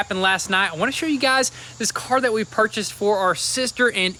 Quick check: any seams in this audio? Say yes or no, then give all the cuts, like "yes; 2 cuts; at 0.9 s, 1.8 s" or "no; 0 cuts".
no; 0 cuts